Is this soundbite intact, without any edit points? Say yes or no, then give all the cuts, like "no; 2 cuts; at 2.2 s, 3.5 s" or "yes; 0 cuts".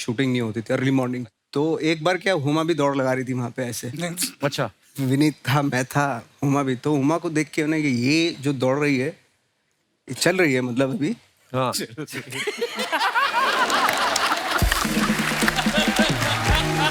yes; 0 cuts